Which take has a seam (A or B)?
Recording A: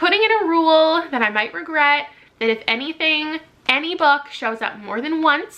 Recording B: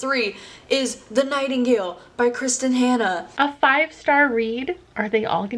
B